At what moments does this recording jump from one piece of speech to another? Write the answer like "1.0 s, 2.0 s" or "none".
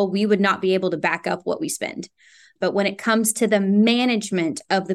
2.5 s